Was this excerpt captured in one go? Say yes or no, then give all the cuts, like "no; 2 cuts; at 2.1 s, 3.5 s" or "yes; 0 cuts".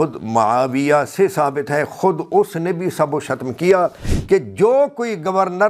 no; 1 cut; at 4.1 s